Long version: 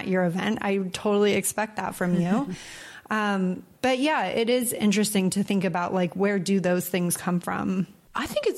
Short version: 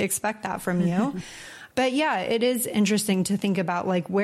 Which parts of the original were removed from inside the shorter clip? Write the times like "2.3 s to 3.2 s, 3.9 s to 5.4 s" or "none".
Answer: 2.9 s to 3.7 s